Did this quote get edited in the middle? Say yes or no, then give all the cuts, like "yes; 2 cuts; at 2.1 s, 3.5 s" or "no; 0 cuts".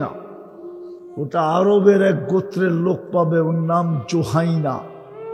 no; 0 cuts